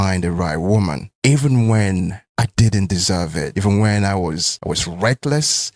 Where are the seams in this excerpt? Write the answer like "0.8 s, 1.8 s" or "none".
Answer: 1.1 s, 2.2 s, 3.5 s, 4.5 s